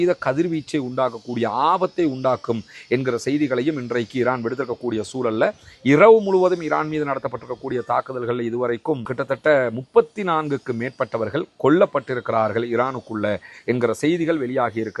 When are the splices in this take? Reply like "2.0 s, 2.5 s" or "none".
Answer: none